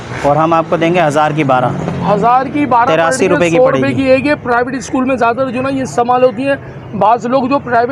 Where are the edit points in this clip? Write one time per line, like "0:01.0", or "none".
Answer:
none